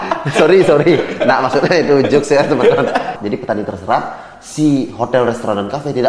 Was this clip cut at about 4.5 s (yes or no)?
no